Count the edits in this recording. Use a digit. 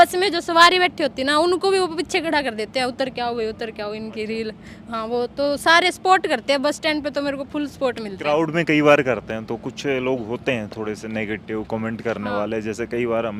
0